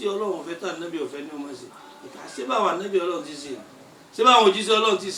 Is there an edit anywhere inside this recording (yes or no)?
no